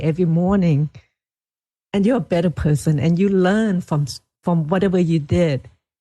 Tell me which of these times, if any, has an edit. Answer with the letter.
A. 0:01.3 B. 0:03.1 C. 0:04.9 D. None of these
D